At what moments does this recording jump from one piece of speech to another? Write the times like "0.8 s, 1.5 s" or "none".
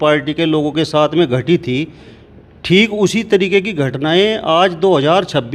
none